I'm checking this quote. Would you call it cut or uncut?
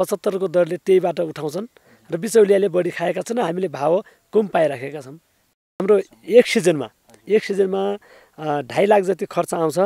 cut